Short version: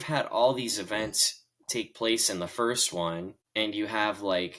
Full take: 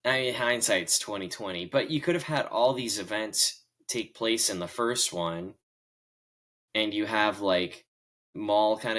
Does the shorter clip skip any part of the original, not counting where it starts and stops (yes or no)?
yes